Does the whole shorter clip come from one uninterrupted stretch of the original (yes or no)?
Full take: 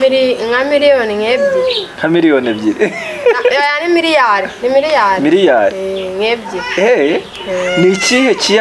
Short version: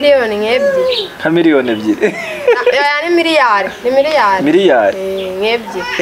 yes